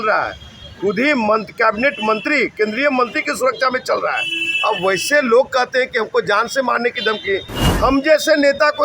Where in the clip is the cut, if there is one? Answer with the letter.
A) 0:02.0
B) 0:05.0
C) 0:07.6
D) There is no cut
C